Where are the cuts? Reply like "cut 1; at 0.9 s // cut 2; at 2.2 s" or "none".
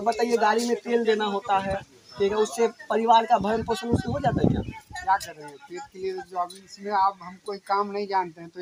none